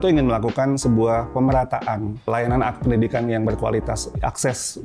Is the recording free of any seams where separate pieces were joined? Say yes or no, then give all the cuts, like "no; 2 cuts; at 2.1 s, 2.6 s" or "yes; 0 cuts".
no; 1 cut; at 2.3 s